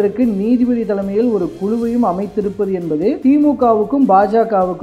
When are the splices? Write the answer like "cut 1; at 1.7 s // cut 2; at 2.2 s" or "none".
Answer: none

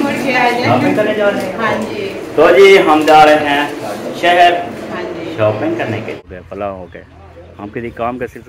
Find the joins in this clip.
cut 1; at 6.2 s

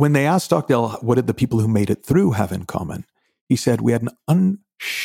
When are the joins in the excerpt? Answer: cut 1; at 1.0 s

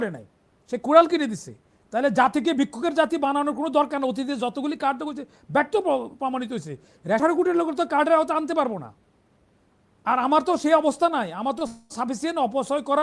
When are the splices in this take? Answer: cut 1; at 7.2 s

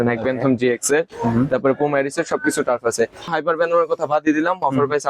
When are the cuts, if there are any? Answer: cut 1; at 3.3 s

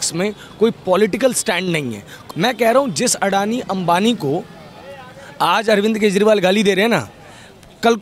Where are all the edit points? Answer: cut 1; at 2.1 s

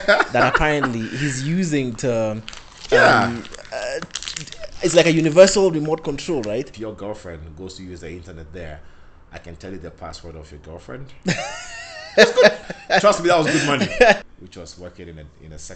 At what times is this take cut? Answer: cut 1; at 6.7 s // cut 2; at 14.2 s

